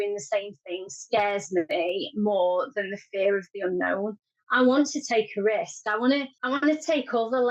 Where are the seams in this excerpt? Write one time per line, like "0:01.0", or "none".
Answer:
none